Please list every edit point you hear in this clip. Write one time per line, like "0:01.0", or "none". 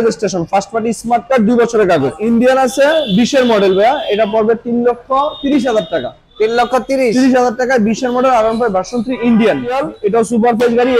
0:02.1
0:09.8